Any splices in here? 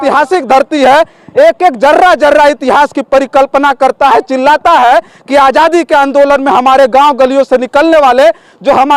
no; 0 cuts

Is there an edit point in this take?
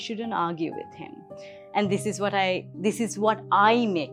no; 0 cuts

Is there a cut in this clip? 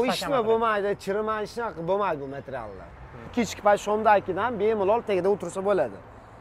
yes; 1 cut; at 3.3 s

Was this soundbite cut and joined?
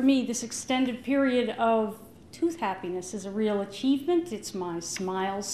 yes; 1 cut; at 2.3 s

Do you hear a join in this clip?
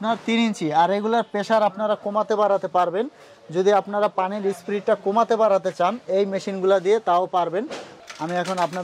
no; 0 cuts

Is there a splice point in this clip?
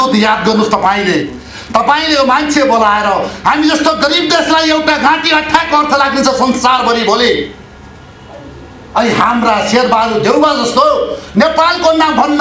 no; 0 cuts

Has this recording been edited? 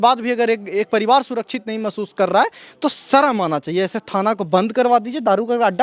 no; 0 cuts

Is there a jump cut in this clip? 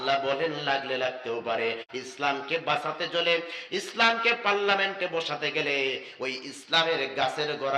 yes; 1 cut; at 1.8 s

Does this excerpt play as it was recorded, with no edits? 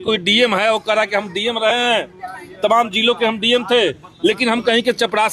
yes; 0 cuts

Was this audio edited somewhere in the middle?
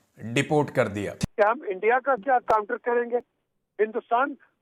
no; 0 cuts

